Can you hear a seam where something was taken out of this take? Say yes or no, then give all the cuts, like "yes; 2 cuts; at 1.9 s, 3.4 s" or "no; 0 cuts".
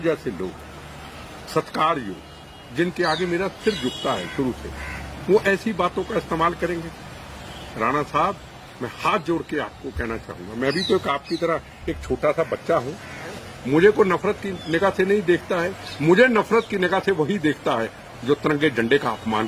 yes; 1 cut; at 13.4 s